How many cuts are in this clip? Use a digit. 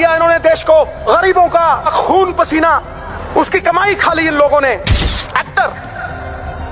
4